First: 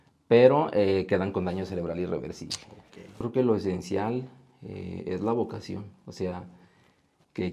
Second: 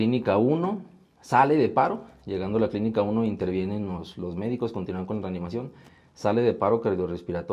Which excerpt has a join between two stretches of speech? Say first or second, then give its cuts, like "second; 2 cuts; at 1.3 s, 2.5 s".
first; 1 cut; at 3.3 s